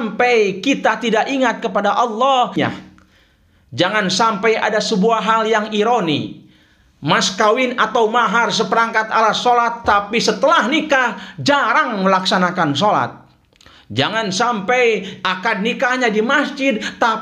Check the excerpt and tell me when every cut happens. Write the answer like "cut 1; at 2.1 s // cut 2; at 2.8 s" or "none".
cut 1; at 2.6 s